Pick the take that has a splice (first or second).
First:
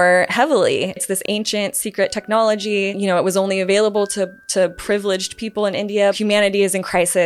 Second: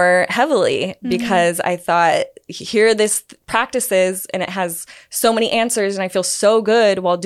first